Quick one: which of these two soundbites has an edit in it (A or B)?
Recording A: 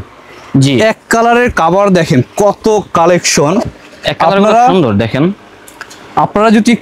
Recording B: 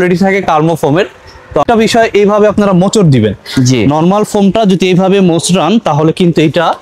B